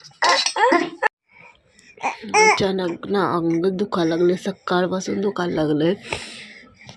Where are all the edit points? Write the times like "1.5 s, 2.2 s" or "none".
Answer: 1.1 s

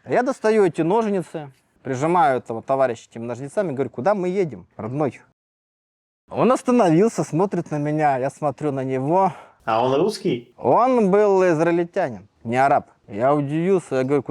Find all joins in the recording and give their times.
none

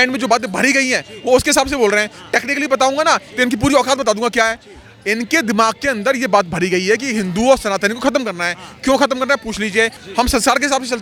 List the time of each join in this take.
none

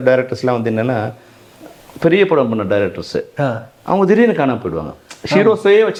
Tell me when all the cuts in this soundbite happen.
none

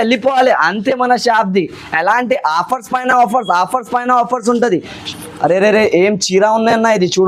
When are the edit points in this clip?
5.0 s

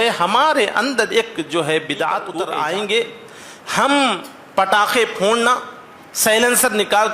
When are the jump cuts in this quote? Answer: 2.3 s

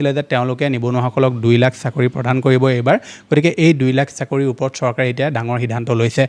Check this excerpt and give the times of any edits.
none

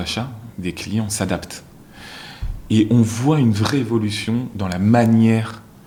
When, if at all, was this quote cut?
none

